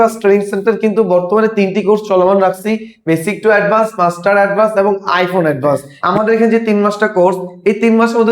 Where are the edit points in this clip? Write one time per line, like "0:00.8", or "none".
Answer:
0:05.9